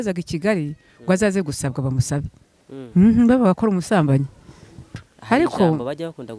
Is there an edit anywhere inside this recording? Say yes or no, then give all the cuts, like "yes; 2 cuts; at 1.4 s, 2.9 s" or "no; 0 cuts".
yes; 1 cut; at 4.9 s